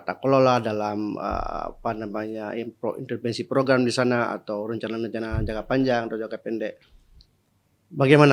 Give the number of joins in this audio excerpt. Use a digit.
0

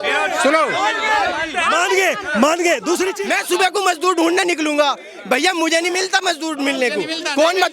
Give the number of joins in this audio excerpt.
1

